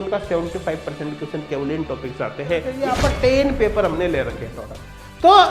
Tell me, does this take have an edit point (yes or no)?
yes